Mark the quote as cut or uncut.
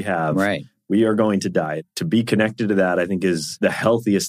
cut